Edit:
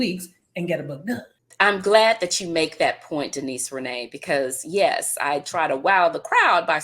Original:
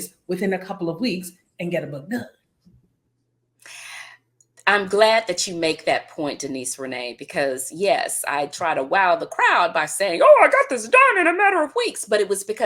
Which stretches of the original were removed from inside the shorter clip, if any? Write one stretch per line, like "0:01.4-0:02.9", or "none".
0:02.4-0:04.4